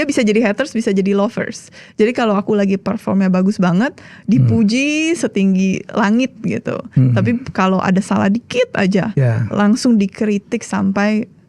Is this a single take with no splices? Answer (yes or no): yes